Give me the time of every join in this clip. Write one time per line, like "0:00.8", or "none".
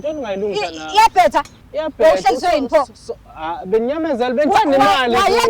0:01.6

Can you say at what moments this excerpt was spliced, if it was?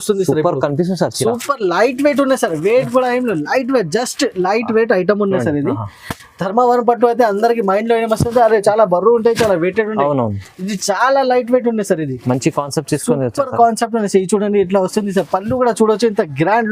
none

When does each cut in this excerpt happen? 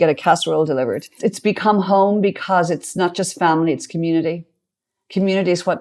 0:01.1

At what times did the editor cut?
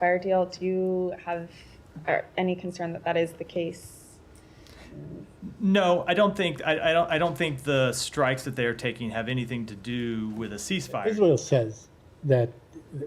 0:11.0

